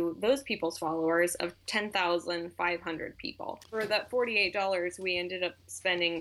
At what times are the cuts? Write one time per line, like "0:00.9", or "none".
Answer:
0:03.7